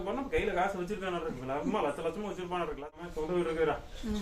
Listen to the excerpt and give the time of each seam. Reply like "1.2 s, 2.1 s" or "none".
3.0 s